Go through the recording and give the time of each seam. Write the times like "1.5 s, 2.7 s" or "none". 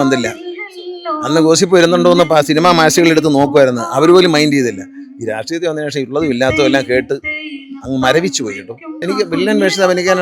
9.0 s

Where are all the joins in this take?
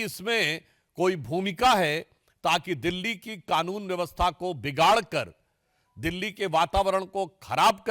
none

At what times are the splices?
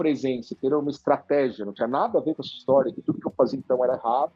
none

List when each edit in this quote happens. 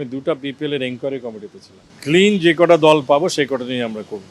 1.9 s

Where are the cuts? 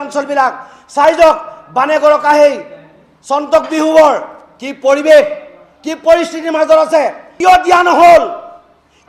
7.2 s

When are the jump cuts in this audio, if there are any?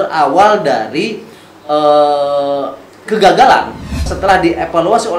4.2 s

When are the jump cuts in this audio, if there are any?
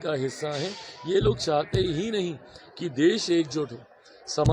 none

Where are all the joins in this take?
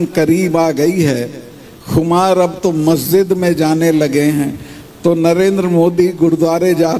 none

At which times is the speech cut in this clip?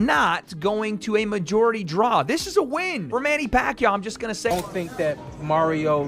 4.5 s

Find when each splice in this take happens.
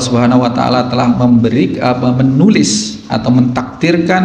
none

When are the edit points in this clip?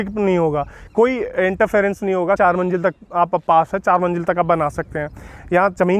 2.4 s

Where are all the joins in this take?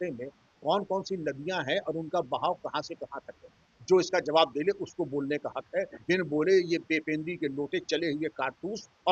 6.0 s

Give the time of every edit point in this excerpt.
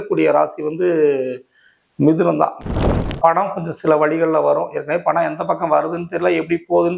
2.6 s

